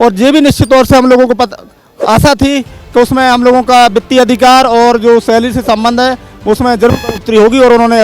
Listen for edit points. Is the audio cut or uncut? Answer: uncut